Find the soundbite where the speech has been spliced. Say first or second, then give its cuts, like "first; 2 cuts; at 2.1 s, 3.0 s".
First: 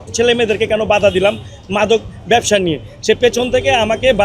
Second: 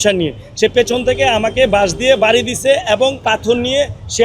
second; 1 cut; at 3.2 s